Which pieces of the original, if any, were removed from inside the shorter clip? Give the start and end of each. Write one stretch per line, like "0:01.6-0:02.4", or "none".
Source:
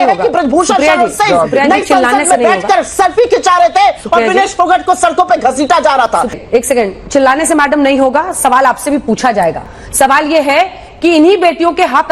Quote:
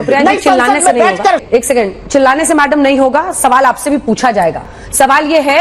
0:02.9-0:06.4